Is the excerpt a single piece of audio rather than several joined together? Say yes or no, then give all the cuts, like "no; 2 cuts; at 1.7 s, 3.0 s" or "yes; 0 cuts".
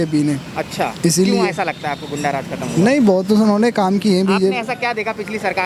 yes; 0 cuts